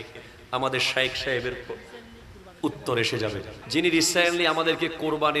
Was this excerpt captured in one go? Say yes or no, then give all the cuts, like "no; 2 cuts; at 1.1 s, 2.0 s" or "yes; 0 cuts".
no; 1 cut; at 3.5 s